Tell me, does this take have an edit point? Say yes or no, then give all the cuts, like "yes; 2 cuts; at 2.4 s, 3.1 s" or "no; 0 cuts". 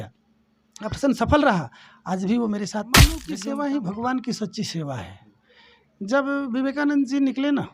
yes; 1 cut; at 3.2 s